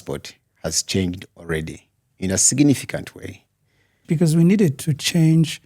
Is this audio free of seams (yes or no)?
no